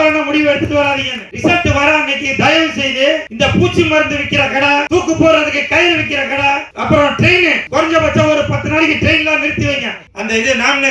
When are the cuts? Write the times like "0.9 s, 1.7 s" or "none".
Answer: 1.2 s, 10.1 s